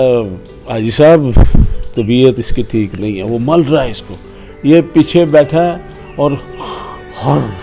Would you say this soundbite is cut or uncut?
uncut